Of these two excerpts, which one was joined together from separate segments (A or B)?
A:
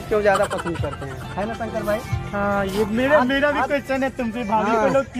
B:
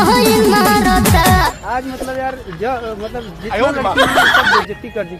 B